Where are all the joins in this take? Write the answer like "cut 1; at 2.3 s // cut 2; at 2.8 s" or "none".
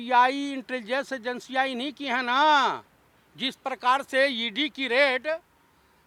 none